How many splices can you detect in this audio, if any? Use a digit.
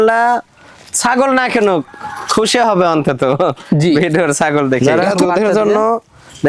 1